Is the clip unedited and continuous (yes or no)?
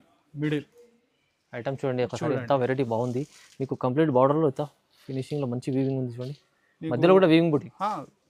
yes